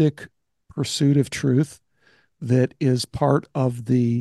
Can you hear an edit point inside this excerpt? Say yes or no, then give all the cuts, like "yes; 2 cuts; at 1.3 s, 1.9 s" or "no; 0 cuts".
no; 0 cuts